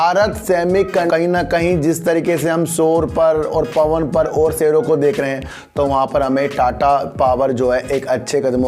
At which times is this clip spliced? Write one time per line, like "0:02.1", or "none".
0:01.0